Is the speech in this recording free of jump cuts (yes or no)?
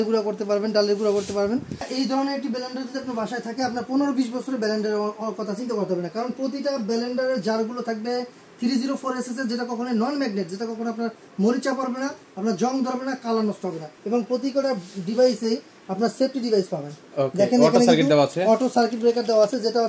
no